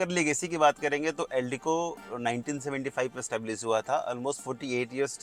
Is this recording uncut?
yes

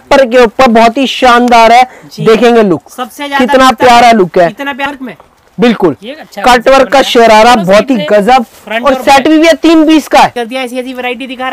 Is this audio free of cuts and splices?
no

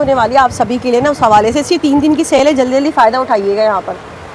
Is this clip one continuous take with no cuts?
yes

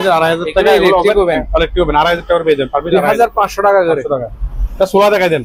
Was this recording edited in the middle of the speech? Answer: no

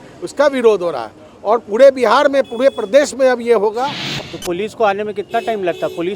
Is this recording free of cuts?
no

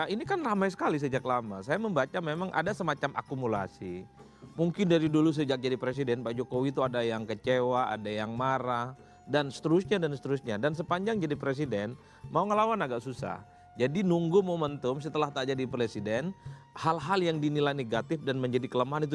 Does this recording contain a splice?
no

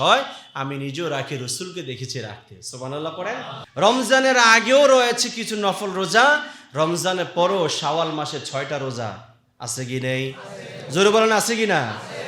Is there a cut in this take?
yes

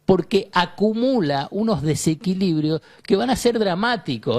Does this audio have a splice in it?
no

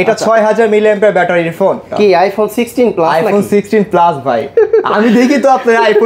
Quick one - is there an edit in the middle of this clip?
yes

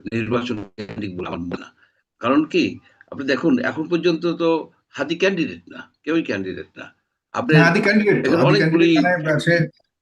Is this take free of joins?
yes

